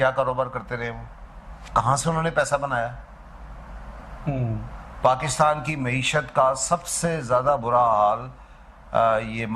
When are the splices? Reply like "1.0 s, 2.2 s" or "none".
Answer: none